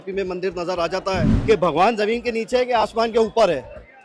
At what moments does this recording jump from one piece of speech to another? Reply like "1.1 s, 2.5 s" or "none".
1.3 s